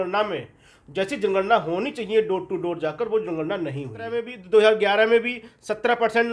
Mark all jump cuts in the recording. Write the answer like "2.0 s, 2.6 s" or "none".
4.3 s